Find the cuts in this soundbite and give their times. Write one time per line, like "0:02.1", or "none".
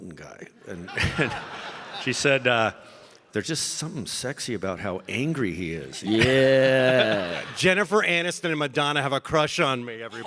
0:07.4